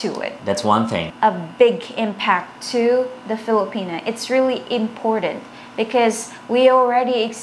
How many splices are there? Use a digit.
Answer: 1